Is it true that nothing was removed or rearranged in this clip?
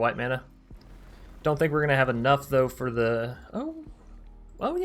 yes; 0 cuts

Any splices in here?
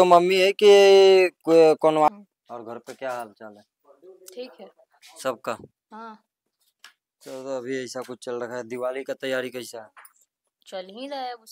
yes; 1 cut; at 2.1 s

